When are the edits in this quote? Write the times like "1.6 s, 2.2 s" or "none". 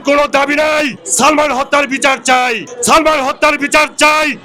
1.0 s, 2.7 s